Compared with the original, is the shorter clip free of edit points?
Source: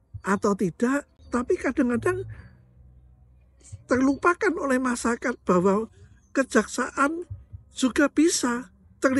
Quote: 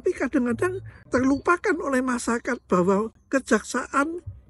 no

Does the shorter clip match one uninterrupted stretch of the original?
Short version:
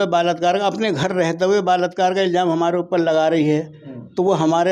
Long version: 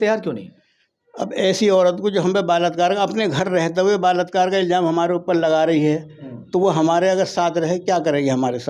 yes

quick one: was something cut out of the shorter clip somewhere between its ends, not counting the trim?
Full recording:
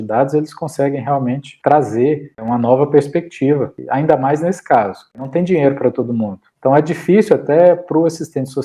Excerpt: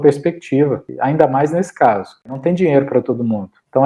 no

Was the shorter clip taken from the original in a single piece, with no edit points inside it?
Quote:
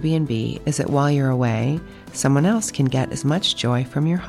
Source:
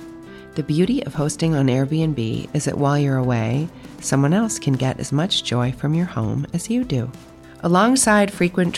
yes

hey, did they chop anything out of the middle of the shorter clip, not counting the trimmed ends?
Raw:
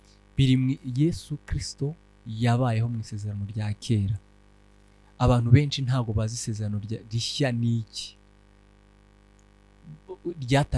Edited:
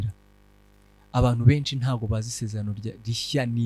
no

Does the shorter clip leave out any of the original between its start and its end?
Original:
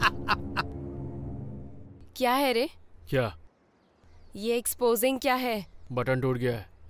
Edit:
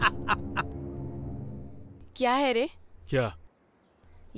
no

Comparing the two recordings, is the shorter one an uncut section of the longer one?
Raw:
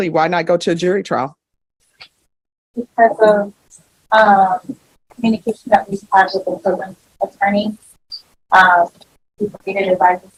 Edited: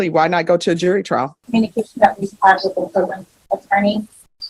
no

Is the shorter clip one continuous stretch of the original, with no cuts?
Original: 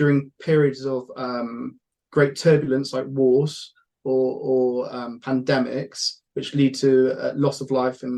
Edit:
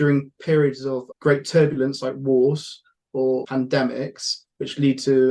no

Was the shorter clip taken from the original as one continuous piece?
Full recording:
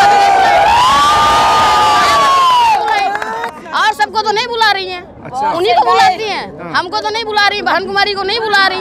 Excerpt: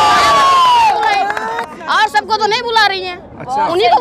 yes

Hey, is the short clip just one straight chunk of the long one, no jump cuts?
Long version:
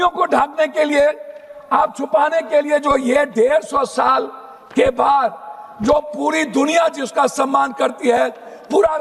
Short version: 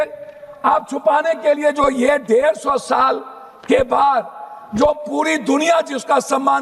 yes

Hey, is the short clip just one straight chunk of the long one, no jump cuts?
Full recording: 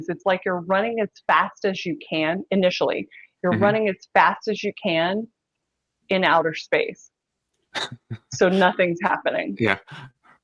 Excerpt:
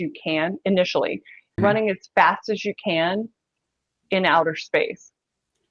no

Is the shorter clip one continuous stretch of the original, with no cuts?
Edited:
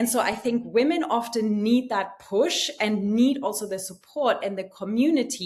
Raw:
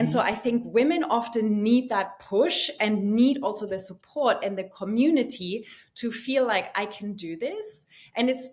yes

